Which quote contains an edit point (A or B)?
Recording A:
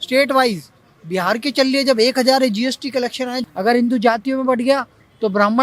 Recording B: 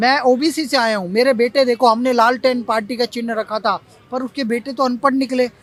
A